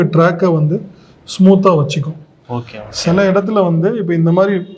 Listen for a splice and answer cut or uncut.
uncut